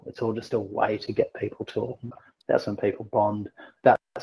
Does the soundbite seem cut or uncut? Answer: cut